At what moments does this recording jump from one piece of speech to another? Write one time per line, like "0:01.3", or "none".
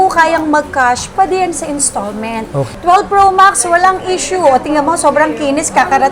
0:02.6